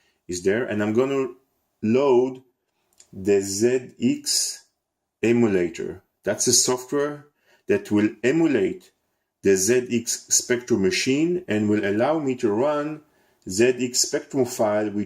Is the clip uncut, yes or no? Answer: no